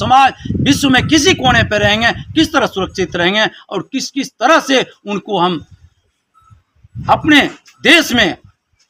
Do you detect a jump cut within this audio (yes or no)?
no